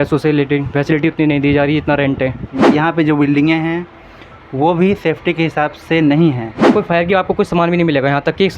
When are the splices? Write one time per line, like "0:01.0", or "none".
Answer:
0:02.6
0:06.7